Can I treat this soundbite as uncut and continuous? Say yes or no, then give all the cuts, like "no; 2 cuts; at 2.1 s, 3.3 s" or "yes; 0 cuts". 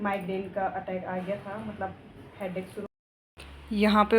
no; 1 cut; at 2.9 s